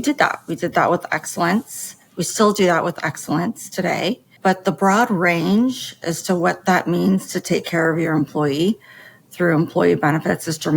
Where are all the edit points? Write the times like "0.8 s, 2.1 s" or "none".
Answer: 4.3 s

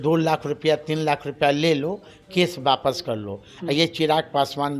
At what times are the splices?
none

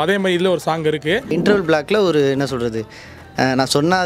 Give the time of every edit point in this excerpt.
1.3 s

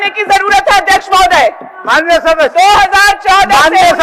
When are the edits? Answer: none

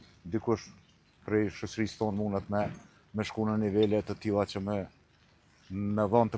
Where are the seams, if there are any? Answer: none

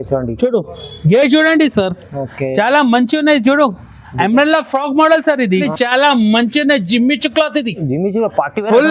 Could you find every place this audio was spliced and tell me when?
5.5 s

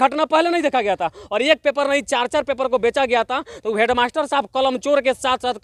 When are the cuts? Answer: none

